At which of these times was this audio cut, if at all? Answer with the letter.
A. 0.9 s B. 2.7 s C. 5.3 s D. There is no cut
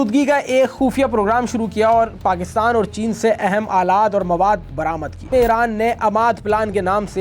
C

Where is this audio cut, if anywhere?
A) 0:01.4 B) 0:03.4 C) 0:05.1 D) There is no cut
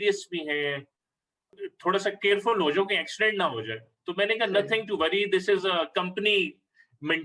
A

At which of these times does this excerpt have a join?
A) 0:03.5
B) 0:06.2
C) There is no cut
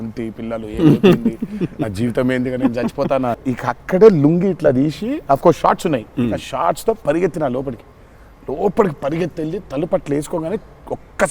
A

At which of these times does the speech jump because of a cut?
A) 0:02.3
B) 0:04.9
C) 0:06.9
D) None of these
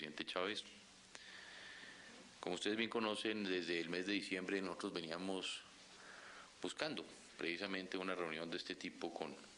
C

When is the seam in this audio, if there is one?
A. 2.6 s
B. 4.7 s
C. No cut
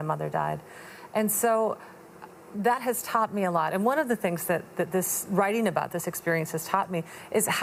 C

